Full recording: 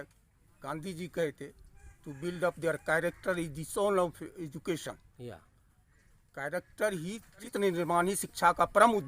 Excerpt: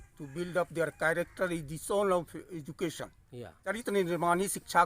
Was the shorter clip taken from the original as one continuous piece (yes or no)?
no